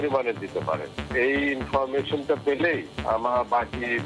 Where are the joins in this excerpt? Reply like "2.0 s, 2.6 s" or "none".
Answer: none